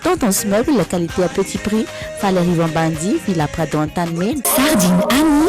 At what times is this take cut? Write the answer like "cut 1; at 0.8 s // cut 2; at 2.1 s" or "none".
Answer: cut 1; at 4.4 s